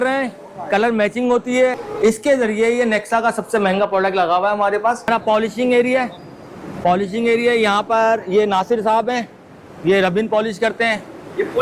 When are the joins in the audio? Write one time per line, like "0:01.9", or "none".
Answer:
0:01.8
0:05.1